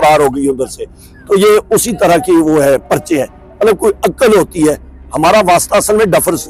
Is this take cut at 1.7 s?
no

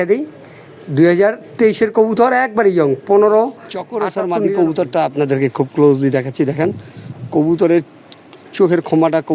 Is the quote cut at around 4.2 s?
yes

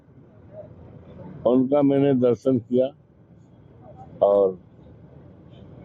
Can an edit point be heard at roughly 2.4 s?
yes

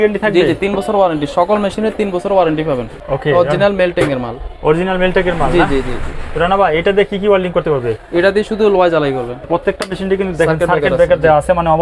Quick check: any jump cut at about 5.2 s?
no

